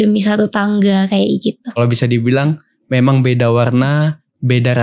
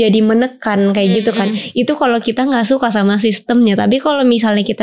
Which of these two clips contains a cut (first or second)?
first